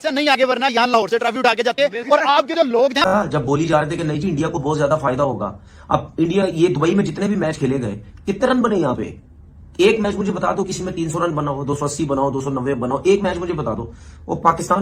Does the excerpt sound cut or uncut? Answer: cut